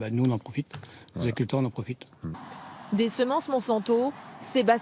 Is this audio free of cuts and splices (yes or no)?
no